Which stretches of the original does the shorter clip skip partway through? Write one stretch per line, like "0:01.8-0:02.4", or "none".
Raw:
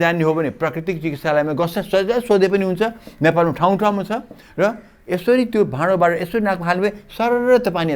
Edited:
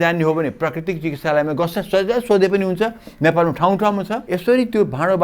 0:04.2-0:05.0